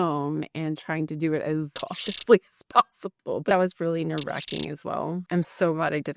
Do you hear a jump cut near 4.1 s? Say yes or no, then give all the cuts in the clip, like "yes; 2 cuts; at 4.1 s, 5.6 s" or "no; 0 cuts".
no; 0 cuts